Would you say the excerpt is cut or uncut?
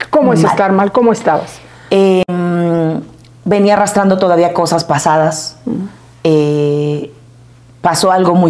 uncut